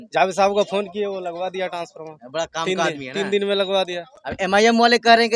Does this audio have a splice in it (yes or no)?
no